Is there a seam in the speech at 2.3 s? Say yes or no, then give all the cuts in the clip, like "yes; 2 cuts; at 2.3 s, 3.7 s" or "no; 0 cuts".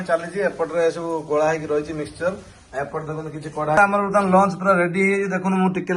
no; 1 cut; at 3.8 s